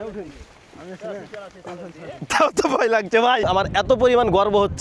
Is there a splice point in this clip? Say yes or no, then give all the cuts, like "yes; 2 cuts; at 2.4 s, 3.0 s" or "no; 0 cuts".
yes; 1 cut; at 3.4 s